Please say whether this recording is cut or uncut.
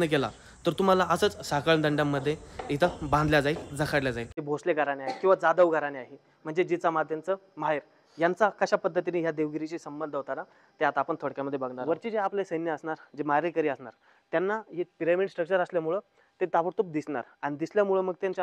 cut